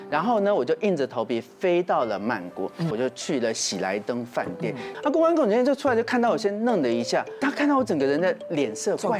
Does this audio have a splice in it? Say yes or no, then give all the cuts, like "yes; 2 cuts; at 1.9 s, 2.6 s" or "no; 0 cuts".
yes; 3 cuts; at 2.9 s, 4.9 s, 7.3 s